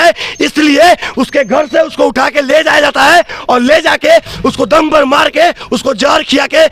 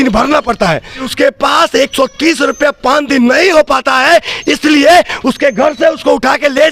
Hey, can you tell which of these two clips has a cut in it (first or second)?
second